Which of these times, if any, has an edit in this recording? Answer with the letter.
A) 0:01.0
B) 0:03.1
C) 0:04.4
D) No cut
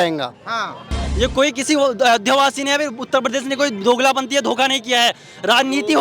A